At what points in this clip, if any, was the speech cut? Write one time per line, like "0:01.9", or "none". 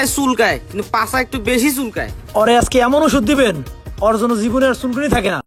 none